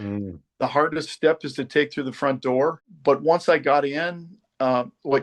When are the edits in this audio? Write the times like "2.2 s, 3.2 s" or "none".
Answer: 2.9 s